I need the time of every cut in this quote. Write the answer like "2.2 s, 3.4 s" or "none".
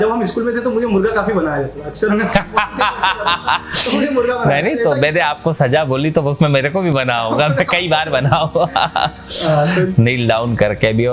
none